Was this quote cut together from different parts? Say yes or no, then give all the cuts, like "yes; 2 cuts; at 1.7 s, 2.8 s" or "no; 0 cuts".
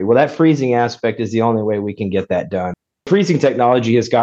yes; 1 cut; at 2.9 s